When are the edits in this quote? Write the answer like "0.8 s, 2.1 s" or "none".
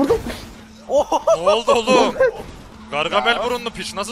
none